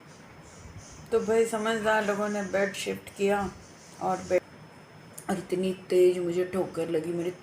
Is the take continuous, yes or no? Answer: no